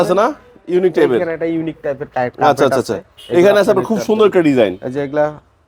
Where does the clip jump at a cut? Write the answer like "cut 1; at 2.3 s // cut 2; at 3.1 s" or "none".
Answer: none